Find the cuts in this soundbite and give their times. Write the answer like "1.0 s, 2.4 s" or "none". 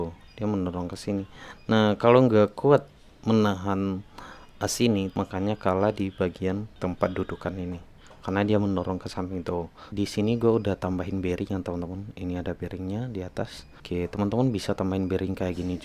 5.2 s, 6.7 s, 9.9 s, 13.7 s

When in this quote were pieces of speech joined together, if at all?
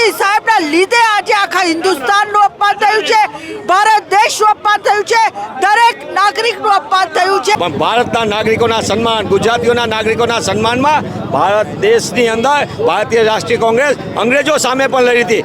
7.6 s

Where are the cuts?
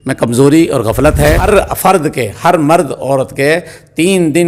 1.4 s

